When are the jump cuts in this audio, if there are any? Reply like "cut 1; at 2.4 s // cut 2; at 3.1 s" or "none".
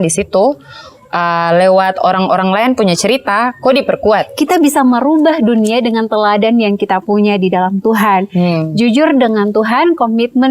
cut 1; at 4.3 s